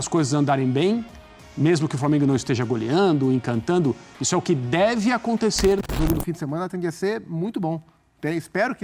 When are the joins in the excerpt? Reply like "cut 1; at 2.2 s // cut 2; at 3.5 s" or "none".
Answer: cut 1; at 5.8 s